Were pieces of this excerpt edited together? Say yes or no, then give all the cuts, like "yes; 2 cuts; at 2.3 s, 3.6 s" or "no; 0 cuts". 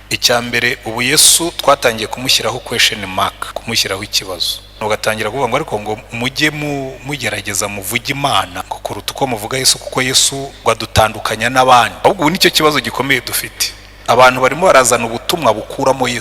yes; 5 cuts; at 3.4 s, 4.8 s, 8.6 s, 10.5 s, 12.0 s